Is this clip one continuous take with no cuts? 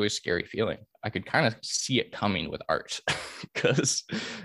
no; 1 cut; at 0.9 s

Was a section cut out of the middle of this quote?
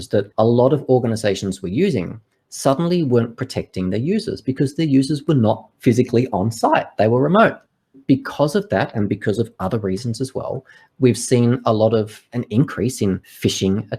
no; 0 cuts

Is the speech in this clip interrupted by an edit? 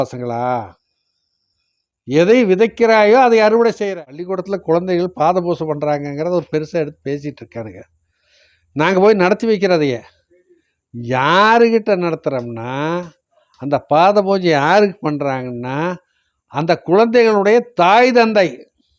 yes; 1 cut; at 3.9 s

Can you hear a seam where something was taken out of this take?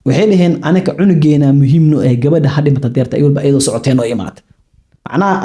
no; 0 cuts

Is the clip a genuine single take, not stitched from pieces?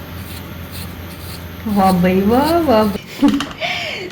no; 1 cut; at 2.9 s

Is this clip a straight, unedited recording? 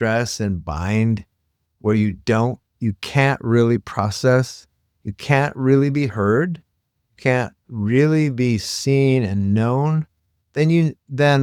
yes; 0 cuts

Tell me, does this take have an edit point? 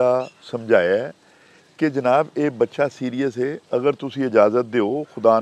no; 0 cuts

